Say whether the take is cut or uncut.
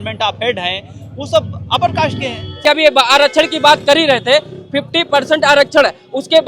cut